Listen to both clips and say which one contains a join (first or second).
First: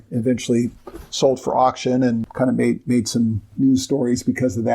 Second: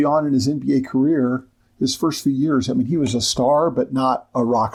first